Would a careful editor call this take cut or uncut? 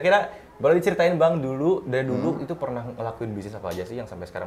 uncut